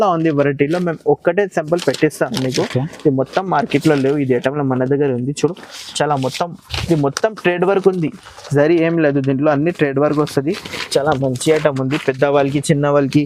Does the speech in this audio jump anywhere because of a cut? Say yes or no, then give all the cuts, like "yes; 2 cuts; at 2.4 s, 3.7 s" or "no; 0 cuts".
no; 0 cuts